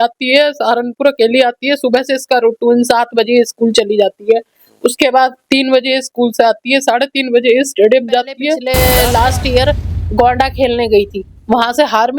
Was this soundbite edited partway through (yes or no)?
yes